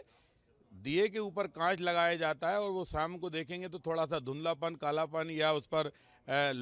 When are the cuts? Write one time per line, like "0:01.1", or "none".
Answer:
none